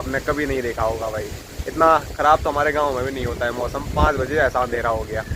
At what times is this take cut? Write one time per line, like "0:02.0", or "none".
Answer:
none